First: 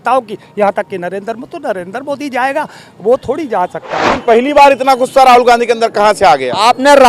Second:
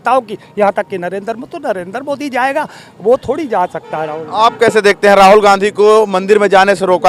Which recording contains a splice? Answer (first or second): first